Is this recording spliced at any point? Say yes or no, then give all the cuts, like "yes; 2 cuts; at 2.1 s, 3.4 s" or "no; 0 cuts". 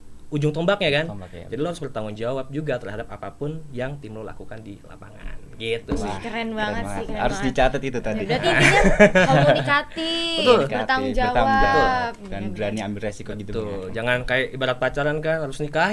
no; 0 cuts